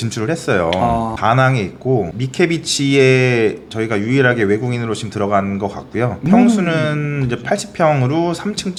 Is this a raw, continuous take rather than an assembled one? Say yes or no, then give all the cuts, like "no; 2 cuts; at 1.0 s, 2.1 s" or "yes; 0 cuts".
yes; 0 cuts